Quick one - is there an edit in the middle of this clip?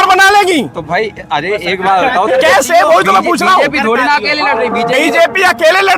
no; 0 cuts

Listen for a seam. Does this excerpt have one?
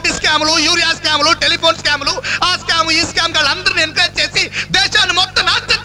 no; 0 cuts

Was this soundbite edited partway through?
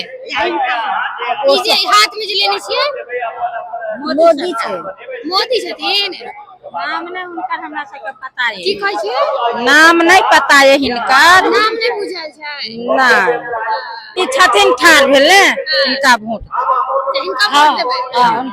yes; 1 cut; at 14.1 s

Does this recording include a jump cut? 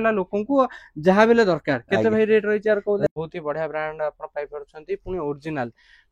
yes; 1 cut; at 3.1 s

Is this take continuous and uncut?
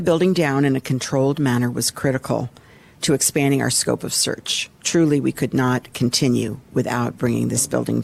yes; 0 cuts

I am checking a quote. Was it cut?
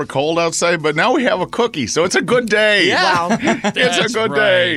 no; 0 cuts

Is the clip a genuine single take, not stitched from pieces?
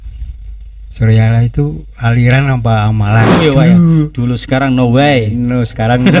no; 1 cut; at 3.3 s

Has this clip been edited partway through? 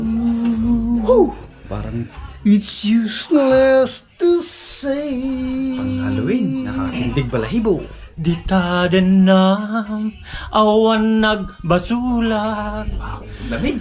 yes; 1 cut; at 8.0 s

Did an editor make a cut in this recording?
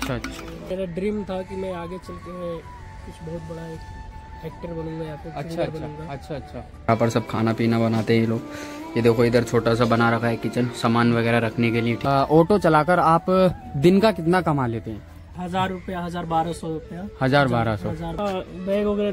yes; 5 cuts; at 0.7 s, 6.9 s, 11.9 s, 15.4 s, 18.1 s

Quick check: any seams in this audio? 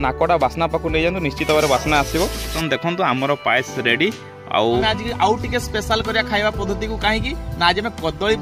yes; 2 cuts; at 2.6 s, 4.8 s

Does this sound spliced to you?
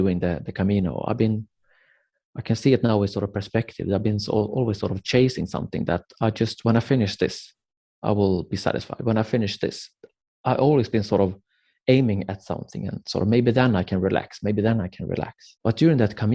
yes; 1 cut; at 15.4 s

